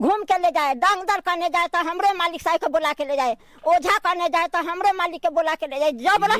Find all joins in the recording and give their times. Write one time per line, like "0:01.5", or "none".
none